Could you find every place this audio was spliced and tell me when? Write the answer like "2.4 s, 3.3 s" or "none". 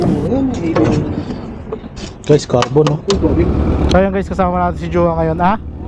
3.5 s